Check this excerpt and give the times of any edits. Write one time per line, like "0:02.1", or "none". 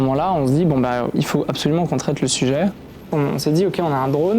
0:01.1
0:03.1